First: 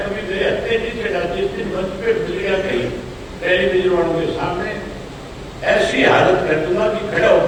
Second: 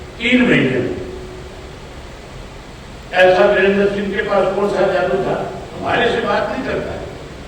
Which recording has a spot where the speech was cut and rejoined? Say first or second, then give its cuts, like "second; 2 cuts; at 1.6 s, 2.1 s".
second; 1 cut; at 5.7 s